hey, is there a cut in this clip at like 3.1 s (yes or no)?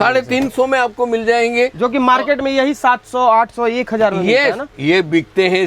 no